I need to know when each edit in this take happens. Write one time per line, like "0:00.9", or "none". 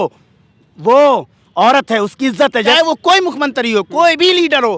0:02.7